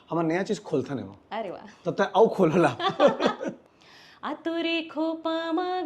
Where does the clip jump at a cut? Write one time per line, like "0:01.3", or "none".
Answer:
0:03.7